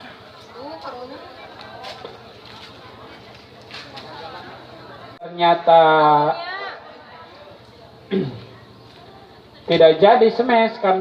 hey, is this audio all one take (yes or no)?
no